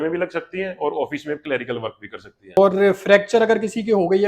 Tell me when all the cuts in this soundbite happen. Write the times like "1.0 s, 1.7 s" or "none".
2.6 s